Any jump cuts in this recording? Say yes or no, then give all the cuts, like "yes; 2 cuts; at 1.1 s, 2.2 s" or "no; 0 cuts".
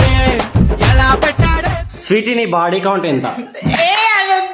yes; 1 cut; at 1.9 s